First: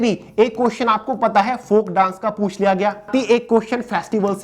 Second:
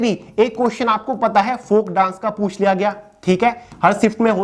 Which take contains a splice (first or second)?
first